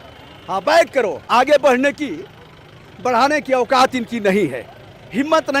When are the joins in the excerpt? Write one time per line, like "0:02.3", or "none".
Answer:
0:01.2